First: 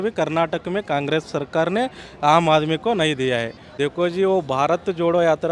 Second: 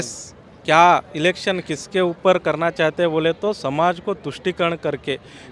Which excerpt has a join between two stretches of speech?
first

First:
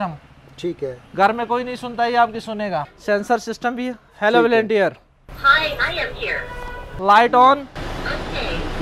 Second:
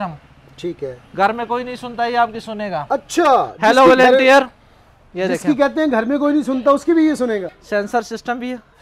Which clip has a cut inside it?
first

